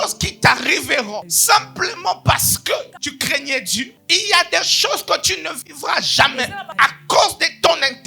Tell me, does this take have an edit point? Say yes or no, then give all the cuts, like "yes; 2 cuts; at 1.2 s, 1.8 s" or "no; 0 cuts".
yes; 4 cuts; at 1.3 s, 2.9 s, 3.9 s, 6.7 s